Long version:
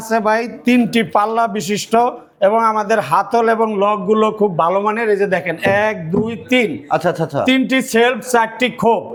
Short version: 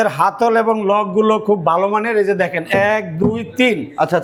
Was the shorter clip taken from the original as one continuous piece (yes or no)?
yes